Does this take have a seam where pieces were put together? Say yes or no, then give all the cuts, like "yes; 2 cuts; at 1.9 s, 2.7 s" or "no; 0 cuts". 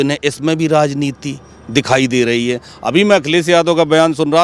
no; 0 cuts